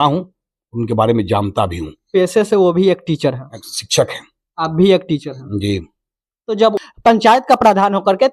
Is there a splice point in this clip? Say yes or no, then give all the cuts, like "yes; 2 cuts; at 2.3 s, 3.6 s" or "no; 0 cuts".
yes; 1 cut; at 6.8 s